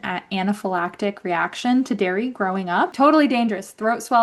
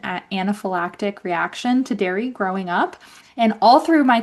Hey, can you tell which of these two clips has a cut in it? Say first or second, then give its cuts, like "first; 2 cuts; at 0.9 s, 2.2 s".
first; 1 cut; at 2.9 s